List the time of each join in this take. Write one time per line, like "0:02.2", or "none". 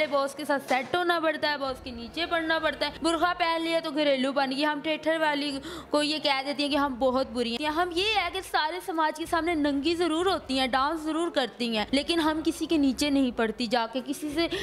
0:02.9
0:07.6
0:11.9